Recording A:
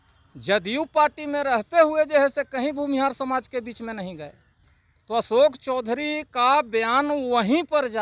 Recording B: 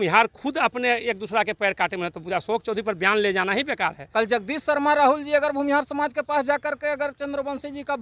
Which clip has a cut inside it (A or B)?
B